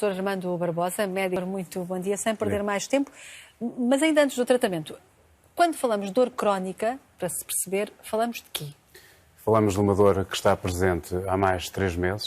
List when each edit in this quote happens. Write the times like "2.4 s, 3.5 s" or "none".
1.4 s

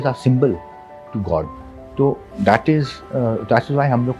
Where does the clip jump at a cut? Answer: none

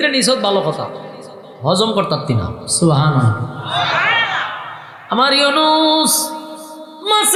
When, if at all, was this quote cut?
none

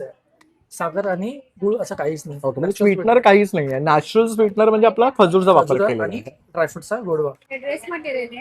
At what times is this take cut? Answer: 7.5 s

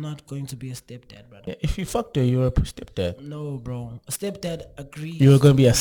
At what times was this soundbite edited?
1.4 s

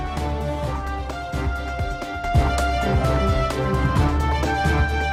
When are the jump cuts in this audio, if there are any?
none

